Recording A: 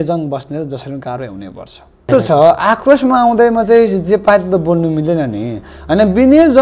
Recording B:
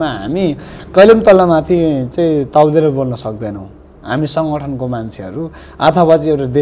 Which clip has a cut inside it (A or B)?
A